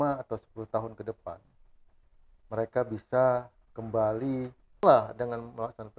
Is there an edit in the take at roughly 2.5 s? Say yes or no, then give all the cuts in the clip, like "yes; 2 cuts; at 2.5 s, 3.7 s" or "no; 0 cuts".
no; 1 cut; at 4.8 s